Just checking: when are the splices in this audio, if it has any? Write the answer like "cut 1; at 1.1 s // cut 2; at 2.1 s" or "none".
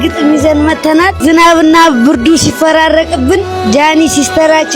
cut 1; at 1.2 s